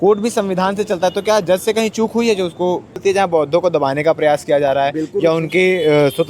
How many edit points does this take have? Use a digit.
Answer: 1